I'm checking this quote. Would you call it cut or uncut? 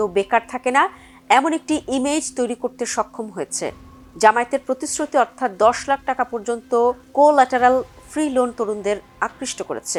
uncut